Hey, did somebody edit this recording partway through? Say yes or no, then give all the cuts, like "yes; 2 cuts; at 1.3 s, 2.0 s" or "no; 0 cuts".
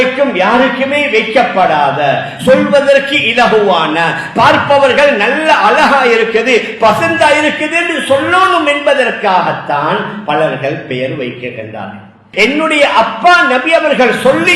yes; 1 cut; at 12.2 s